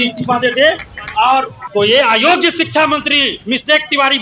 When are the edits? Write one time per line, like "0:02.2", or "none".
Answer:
0:01.6